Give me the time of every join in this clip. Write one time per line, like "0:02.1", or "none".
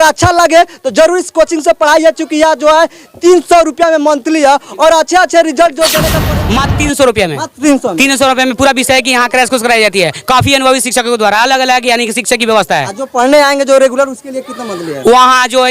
0:06.1

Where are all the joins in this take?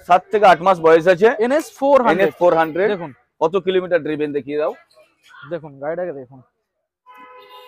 none

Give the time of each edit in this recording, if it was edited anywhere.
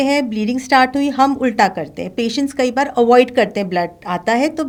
none

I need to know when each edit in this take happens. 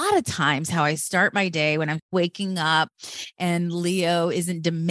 0:02.1

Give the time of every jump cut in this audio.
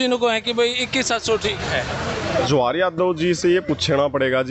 0:02.5

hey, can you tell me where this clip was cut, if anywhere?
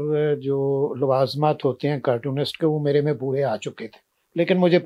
none

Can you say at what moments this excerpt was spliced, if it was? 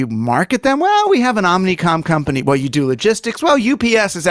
none

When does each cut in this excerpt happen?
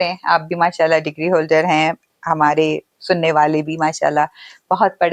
none

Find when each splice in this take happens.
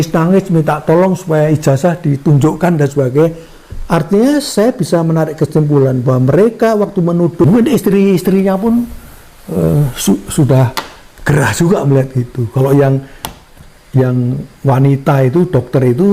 0:07.4

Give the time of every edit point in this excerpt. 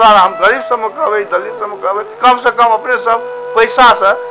0:02.1

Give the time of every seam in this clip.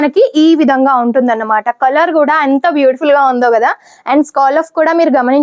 none

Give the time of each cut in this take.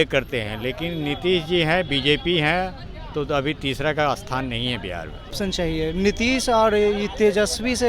0:05.4

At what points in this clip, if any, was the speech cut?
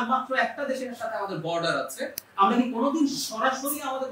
none

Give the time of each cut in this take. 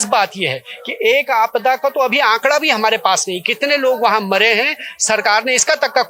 none

